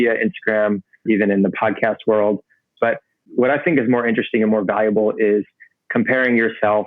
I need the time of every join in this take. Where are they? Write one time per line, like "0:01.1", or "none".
0:01.0
0:03.1

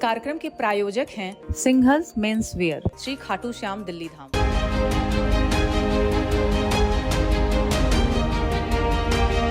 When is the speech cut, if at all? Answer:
none

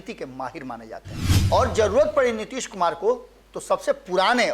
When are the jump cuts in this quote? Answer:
0:01.3

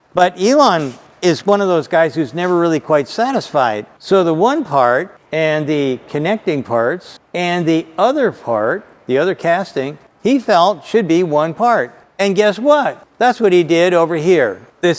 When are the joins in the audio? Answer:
none

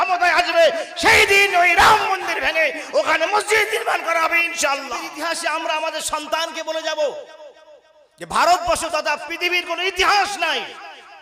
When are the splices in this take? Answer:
0:05.0

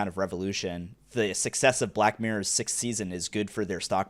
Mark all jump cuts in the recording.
0:00.9

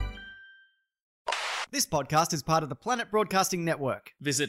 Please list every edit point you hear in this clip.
0:01.3

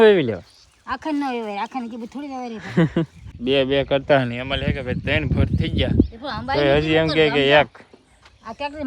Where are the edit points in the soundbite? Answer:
0:03.2

